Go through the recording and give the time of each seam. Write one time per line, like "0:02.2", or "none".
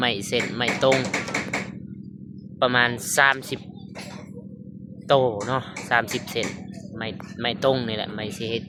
none

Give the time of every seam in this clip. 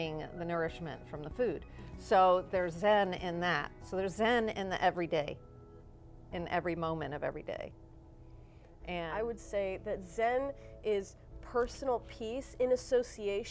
0:09.0

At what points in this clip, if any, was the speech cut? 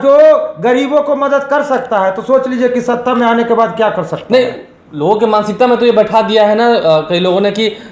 none

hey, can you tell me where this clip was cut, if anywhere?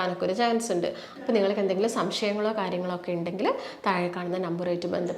0:01.1

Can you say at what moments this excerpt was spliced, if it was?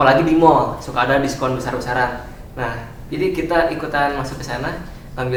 none

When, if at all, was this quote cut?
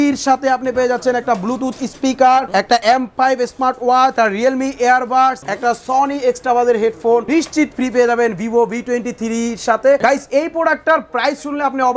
0:02.7
0:04.1
0:05.5
0:07.2
0:10.0

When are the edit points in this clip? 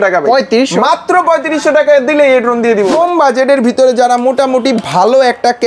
0:02.9

